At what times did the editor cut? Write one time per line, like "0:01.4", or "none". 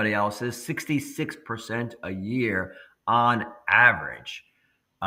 none